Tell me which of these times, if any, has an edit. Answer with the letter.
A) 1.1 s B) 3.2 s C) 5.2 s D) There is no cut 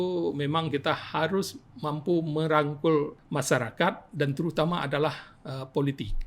B